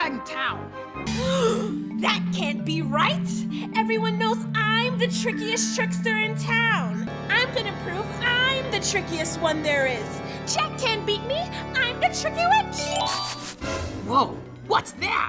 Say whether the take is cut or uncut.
cut